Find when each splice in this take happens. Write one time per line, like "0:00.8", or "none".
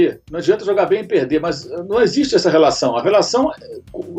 none